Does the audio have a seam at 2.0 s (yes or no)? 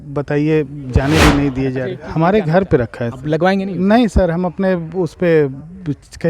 yes